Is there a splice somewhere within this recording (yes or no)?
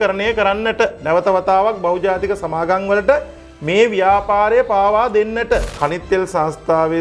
yes